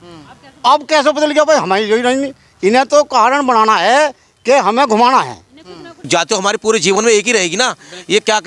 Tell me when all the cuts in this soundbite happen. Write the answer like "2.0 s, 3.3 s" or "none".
6.0 s